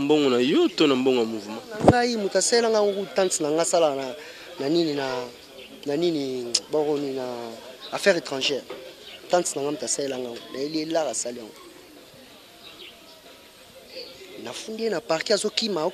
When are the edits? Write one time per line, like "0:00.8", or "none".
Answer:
none

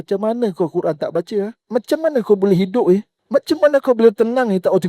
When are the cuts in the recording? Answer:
0:01.6
0:03.2

